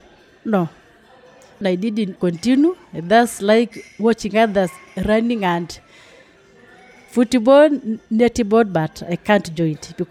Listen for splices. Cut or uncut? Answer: cut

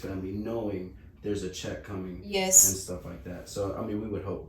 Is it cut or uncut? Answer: uncut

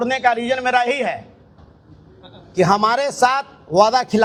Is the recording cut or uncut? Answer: uncut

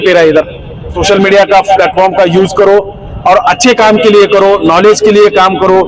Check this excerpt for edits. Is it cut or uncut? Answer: cut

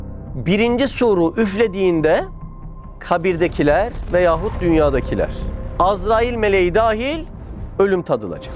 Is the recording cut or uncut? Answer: uncut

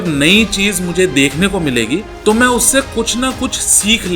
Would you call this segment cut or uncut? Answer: cut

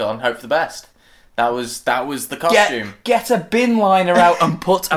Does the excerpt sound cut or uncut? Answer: uncut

